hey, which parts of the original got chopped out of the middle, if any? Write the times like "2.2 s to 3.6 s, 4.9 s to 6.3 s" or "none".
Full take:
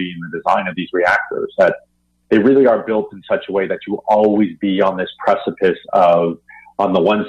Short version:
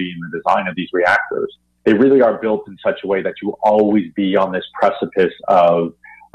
1.5 s to 1.9 s